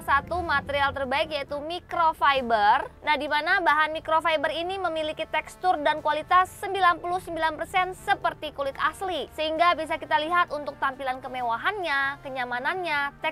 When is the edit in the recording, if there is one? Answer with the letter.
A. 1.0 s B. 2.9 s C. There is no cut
C